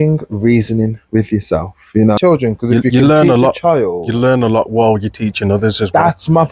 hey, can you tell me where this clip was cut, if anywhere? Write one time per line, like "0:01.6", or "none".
0:02.2